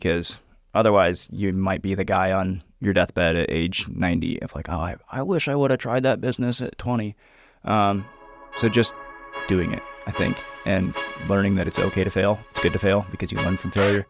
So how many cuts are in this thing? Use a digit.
0